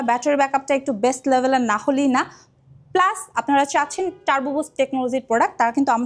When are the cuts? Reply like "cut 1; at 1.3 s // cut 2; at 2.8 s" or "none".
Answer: none